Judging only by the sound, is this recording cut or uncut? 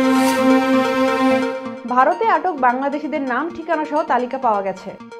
cut